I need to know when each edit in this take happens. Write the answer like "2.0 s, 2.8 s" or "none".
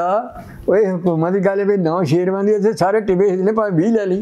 none